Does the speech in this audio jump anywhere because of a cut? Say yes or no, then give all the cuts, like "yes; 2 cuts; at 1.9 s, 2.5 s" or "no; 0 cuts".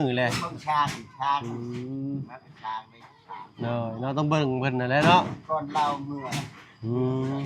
no; 0 cuts